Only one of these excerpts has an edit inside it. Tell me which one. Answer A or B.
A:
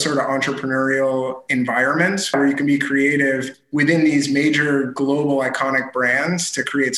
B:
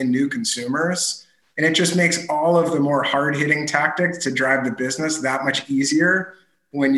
A